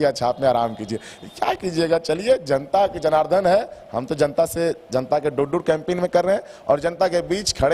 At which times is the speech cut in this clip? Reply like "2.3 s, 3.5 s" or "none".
none